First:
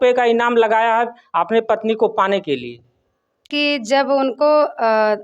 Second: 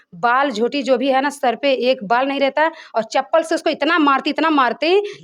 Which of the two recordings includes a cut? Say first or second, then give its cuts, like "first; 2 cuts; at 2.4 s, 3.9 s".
first; 1 cut; at 3.5 s